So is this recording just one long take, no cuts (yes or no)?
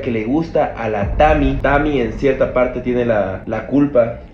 no